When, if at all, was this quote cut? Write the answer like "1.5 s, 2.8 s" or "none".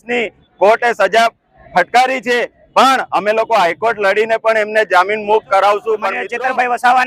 6.2 s